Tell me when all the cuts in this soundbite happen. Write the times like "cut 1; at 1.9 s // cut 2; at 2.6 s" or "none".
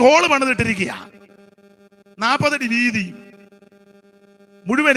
none